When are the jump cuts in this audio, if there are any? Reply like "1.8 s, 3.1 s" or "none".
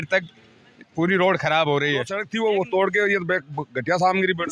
2.2 s